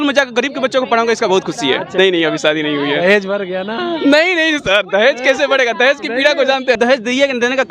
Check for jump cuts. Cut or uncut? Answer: cut